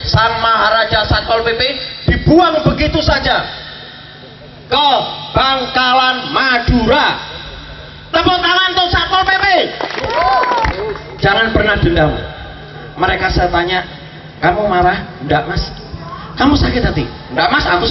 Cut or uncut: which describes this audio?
cut